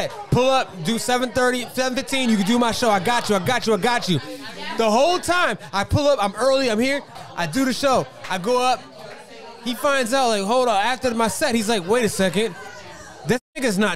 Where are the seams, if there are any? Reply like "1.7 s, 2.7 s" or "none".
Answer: 7.1 s